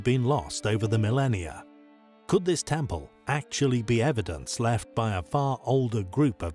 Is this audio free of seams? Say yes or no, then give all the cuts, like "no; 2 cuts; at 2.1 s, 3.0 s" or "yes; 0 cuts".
yes; 0 cuts